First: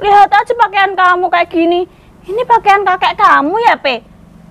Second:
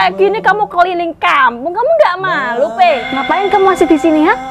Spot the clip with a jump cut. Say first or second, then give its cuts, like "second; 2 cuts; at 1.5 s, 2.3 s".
second; 1 cut; at 3.1 s